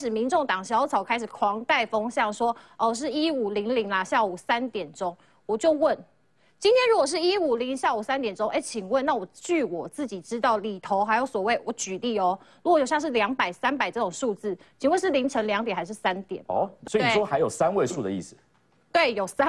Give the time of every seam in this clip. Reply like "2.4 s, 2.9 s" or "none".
16.8 s

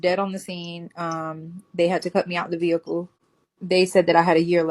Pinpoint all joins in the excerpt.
3.2 s

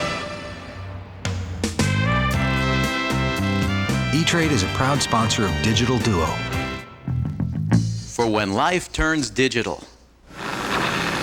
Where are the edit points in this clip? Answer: 7.1 s

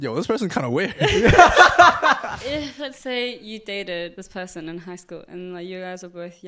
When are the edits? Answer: 2.2 s, 4.2 s

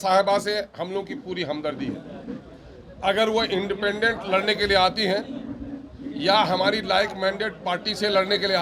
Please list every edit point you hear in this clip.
none

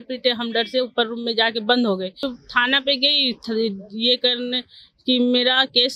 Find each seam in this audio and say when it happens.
2.2 s

